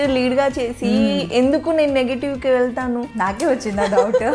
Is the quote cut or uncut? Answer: uncut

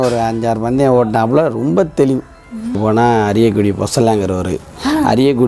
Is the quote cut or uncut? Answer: cut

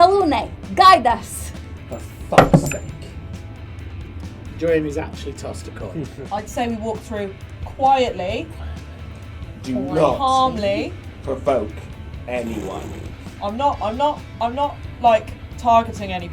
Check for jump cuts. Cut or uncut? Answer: cut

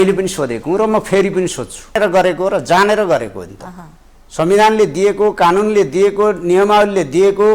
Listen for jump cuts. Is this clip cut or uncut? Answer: cut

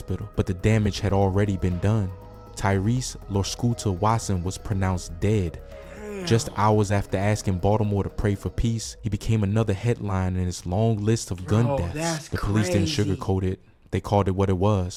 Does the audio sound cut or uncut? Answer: uncut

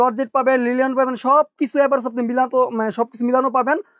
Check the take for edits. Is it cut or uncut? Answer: uncut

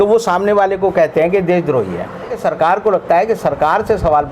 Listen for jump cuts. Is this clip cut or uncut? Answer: cut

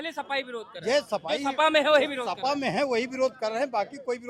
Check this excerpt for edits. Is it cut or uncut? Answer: uncut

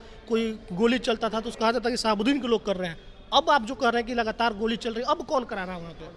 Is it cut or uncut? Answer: uncut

